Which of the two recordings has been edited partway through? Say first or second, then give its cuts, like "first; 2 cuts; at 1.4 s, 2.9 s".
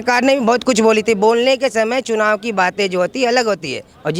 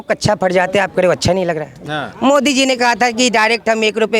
second; 1 cut; at 1.7 s